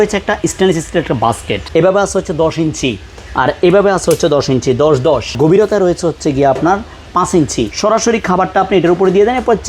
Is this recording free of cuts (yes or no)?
no